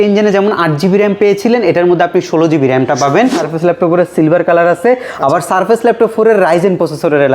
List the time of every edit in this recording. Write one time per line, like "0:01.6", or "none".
0:03.3

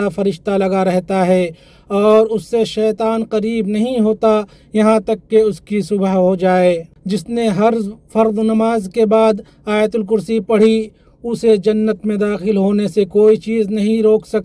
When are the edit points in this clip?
0:06.9

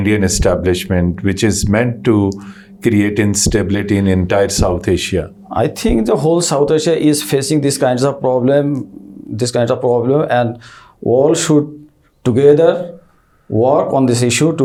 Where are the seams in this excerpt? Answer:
none

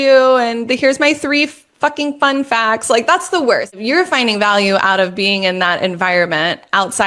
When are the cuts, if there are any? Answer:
0:03.8

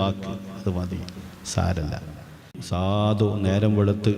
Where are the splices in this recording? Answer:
0:02.6

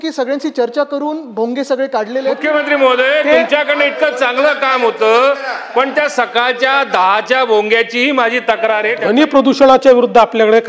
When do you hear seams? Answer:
0:02.4
0:08.9

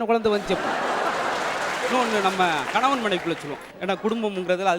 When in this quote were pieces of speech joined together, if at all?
none

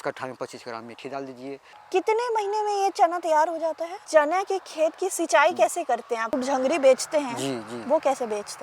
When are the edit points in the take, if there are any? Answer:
0:01.7
0:03.9
0:06.4

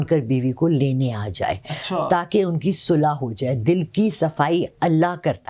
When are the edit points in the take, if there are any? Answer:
none

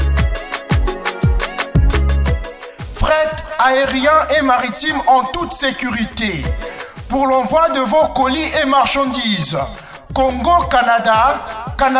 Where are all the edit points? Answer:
none

